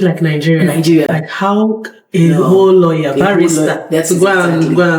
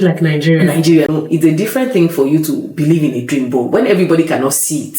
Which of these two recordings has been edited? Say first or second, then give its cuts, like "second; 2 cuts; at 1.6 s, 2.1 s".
second; 1 cut; at 1.1 s